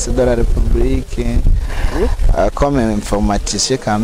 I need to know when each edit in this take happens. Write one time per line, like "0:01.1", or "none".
none